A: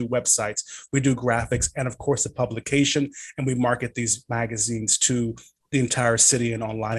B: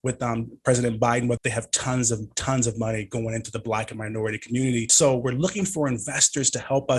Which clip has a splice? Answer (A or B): B